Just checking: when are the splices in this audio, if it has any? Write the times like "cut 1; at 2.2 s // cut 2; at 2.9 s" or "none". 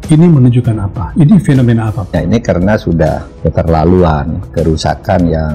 cut 1; at 2.2 s